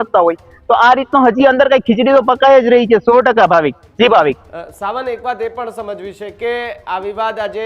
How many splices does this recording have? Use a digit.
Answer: 0